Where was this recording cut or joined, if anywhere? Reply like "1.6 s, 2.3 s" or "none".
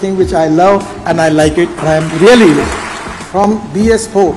3.4 s